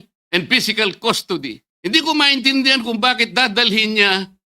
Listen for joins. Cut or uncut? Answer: cut